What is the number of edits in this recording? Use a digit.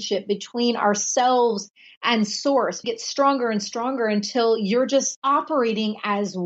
2